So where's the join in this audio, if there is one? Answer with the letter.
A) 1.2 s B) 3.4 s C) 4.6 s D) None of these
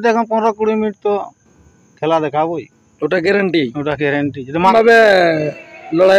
C